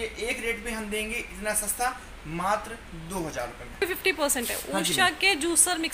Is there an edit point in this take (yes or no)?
yes